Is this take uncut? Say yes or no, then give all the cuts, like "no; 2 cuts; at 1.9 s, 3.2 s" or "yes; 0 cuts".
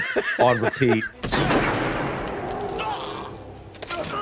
no; 1 cut; at 1.1 s